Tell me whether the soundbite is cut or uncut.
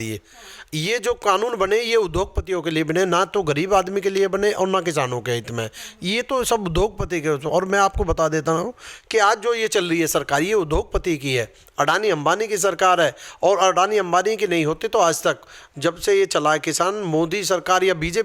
uncut